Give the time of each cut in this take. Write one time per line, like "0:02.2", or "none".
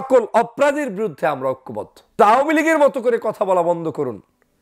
0:02.2